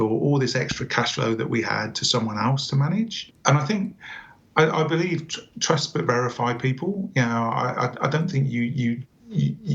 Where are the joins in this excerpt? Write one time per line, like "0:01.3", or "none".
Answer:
0:03.3